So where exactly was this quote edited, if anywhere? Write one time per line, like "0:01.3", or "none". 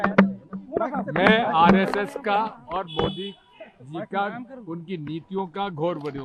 none